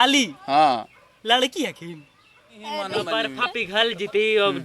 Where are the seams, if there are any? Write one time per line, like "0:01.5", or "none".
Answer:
0:03.0